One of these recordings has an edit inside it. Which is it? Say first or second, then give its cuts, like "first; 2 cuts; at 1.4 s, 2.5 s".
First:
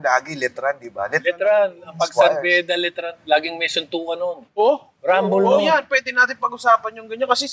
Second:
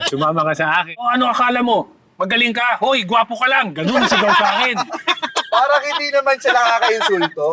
second; 1 cut; at 1.1 s